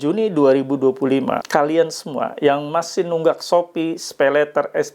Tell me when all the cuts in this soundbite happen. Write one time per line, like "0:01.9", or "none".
0:01.4

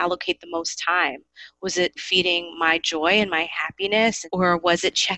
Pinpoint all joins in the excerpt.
0:02.0
0:04.2

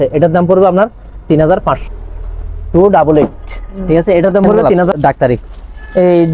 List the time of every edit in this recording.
0:01.8
0:05.0

